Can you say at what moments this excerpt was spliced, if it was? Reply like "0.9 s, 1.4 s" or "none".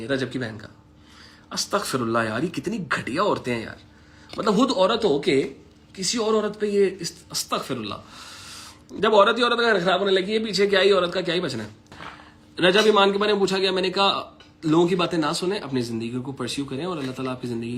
none